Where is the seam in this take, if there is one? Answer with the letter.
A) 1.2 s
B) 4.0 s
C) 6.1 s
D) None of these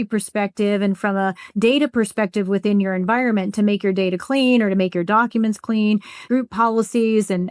C